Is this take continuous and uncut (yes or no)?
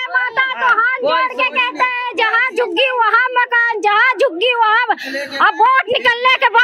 yes